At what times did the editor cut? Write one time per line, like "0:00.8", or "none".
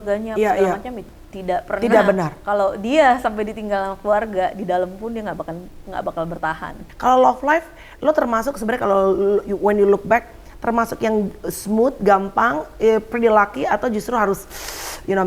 0:01.0
0:06.8